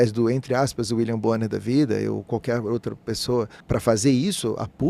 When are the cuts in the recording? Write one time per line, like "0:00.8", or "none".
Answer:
0:03.6